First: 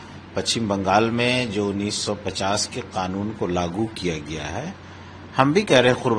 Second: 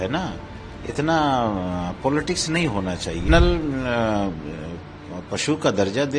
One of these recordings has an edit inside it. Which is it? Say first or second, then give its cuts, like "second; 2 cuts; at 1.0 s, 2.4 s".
second; 1 cut; at 3.2 s